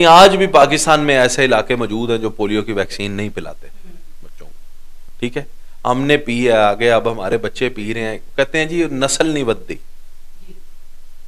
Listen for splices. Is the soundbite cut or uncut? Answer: uncut